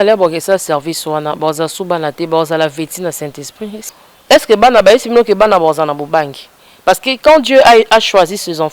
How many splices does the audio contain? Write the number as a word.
one